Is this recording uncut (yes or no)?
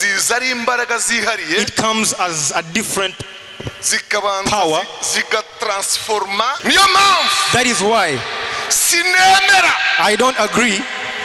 no